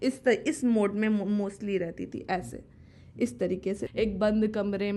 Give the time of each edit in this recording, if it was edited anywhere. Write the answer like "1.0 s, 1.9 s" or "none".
3.9 s